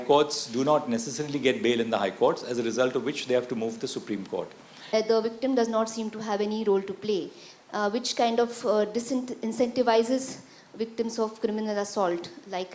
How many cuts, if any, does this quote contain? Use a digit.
1